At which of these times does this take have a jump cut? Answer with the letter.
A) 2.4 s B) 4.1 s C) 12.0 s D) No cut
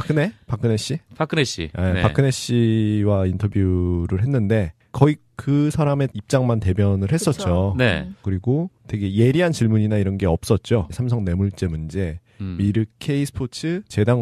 A